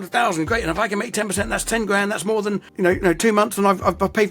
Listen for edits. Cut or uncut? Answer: cut